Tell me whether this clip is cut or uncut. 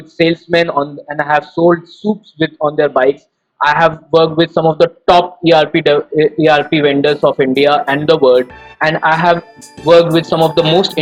uncut